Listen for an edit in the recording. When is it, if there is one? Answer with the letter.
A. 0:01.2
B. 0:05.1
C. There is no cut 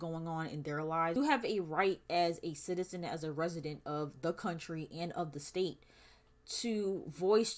A